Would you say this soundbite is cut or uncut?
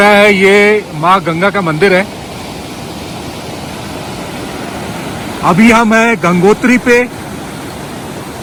uncut